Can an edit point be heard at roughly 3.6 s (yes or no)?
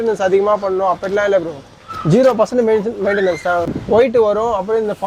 yes